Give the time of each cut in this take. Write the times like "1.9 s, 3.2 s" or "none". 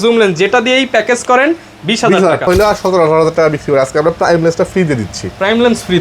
2.5 s